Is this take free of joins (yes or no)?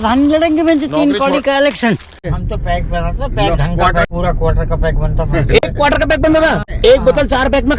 no